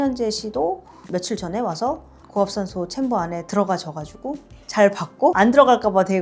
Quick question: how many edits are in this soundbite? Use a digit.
0